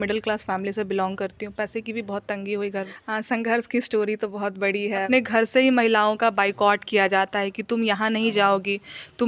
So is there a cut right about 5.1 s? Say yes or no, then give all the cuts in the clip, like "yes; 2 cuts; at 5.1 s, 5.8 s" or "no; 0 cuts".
yes; 2 cuts; at 3.0 s, 5.1 s